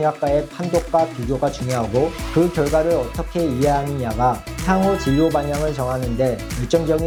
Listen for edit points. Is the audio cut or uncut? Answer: uncut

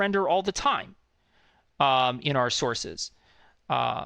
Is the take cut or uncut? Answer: uncut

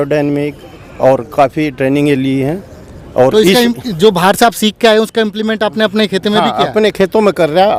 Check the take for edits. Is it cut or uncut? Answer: uncut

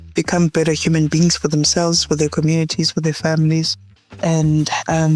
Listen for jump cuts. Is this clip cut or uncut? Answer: uncut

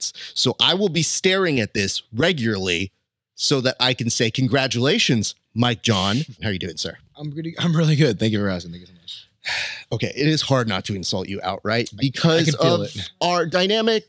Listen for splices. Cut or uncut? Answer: cut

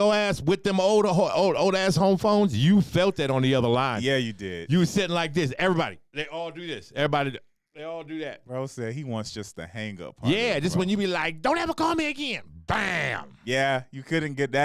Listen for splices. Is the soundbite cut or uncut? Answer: uncut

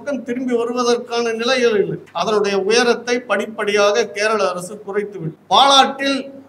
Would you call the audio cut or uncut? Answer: cut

